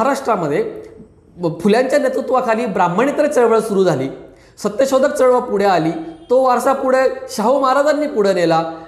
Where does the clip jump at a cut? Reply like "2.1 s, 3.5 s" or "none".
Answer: none